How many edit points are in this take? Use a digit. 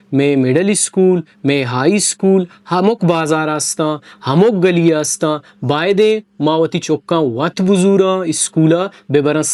0